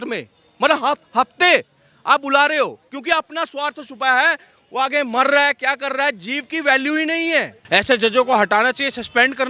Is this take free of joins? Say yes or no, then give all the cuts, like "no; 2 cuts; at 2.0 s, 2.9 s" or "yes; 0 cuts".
no; 1 cut; at 7.6 s